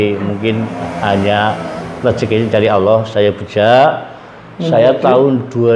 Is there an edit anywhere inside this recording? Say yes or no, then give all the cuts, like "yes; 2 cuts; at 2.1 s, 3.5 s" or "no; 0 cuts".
no; 0 cuts